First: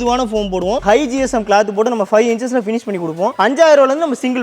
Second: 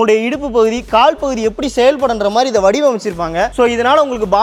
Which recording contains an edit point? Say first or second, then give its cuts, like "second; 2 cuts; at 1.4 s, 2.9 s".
first; 2 cuts; at 0.8 s, 3.3 s